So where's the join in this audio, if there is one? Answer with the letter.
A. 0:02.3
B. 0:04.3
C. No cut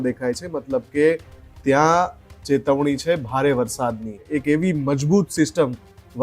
B